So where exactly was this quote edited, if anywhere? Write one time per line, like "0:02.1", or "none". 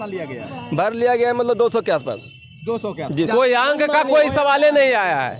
0:03.3

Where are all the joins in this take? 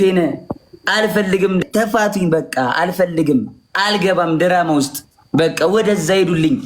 0:01.6

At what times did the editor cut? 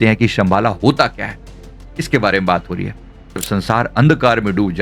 0:03.4

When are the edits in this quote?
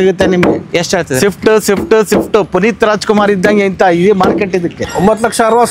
0:04.8

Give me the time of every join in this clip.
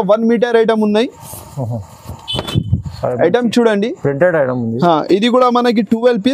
none

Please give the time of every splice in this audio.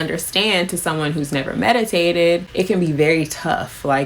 0:02.5

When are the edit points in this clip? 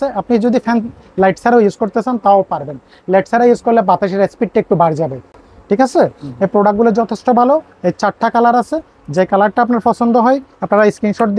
none

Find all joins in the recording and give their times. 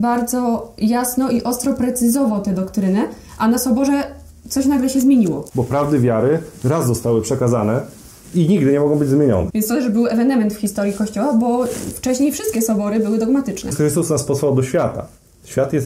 0:05.5
0:09.5
0:13.7

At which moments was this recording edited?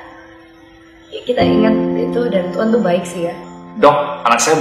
0:03.4

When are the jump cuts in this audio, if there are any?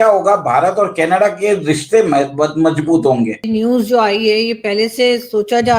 0:03.5

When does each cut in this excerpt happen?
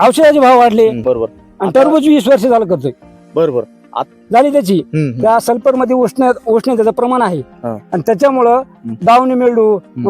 0:01.0
0:04.0

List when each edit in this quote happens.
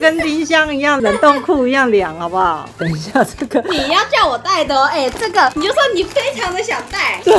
0:02.7

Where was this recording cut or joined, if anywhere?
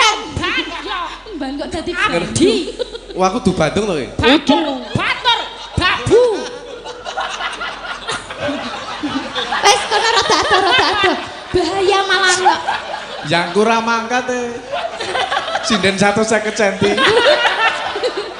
0:08.3

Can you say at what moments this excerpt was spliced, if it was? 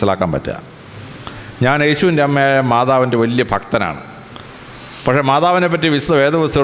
none

